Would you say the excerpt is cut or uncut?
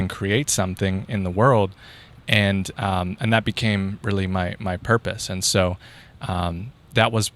uncut